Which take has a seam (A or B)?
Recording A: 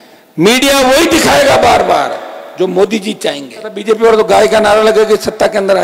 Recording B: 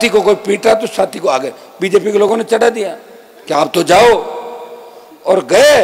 A